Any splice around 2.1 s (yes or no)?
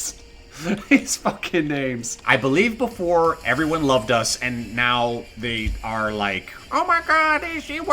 yes